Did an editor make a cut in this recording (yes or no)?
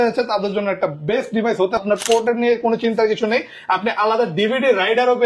yes